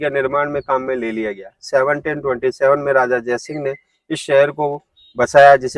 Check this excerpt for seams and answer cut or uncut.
uncut